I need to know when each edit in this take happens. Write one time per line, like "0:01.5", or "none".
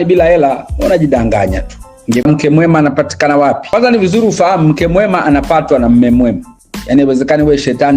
0:02.2
0:03.6